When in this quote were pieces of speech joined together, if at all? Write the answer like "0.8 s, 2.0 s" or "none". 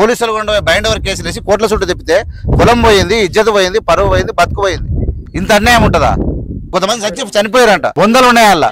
5.3 s, 6.7 s, 7.9 s